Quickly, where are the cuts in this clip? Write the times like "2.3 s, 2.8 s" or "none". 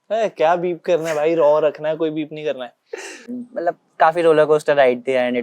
3.2 s

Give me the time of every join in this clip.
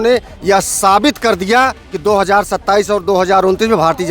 1.9 s

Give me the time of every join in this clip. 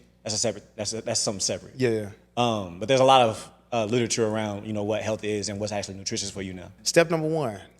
6.8 s

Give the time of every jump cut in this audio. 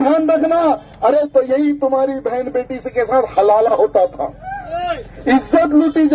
1.3 s

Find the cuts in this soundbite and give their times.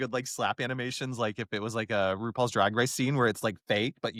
none

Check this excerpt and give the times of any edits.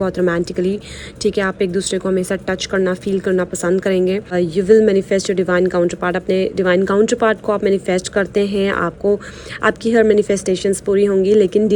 4.3 s

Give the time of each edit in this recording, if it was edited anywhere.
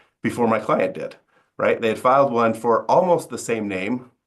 none

